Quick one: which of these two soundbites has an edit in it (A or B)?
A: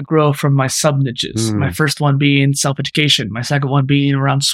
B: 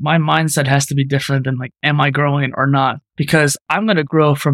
B